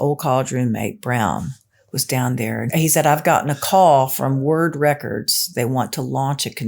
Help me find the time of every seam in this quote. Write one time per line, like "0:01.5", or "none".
0:02.7
0:05.4